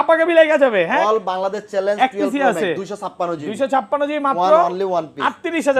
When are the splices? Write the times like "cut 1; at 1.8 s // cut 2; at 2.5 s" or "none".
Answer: none